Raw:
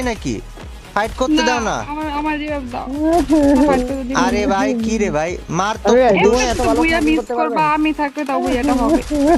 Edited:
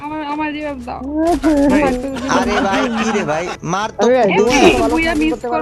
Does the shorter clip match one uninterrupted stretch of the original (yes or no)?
yes